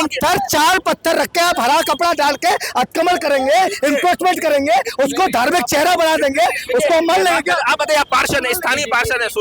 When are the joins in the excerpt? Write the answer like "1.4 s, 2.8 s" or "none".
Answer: none